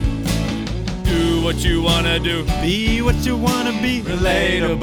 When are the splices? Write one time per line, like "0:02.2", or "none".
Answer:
none

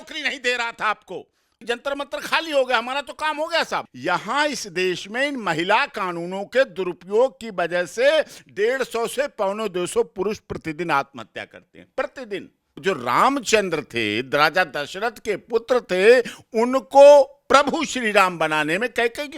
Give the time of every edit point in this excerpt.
0:01.6
0:03.9
0:12.8

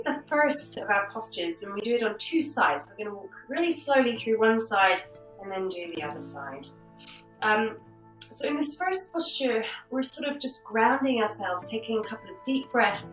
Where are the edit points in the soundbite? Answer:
none

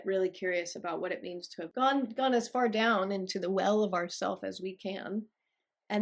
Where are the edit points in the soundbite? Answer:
0:01.7

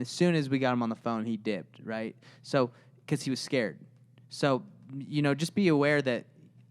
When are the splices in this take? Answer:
none

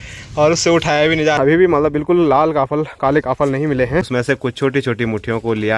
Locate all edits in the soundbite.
0:01.4
0:04.1

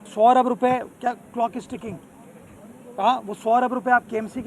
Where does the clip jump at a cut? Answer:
none

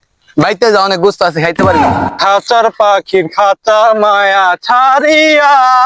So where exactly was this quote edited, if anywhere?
none

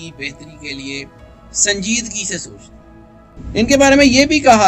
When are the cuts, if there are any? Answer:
0:03.3

